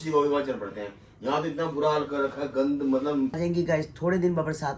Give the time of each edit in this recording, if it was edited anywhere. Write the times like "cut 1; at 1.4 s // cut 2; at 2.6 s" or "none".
cut 1; at 3.4 s